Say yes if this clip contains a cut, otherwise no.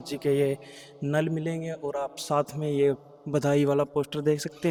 no